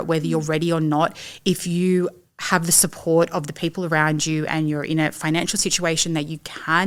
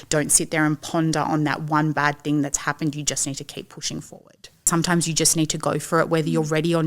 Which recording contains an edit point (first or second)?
second